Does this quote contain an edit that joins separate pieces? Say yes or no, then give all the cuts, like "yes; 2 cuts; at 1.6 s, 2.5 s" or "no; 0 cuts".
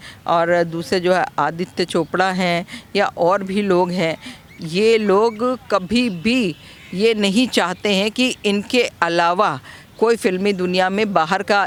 no; 0 cuts